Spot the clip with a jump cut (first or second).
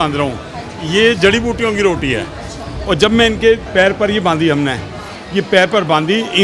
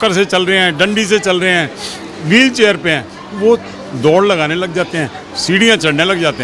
first